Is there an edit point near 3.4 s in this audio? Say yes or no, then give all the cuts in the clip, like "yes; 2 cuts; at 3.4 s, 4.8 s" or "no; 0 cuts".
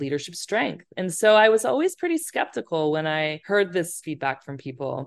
yes; 2 cuts; at 3.4 s, 4.0 s